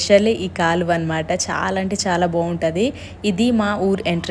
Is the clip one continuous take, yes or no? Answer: yes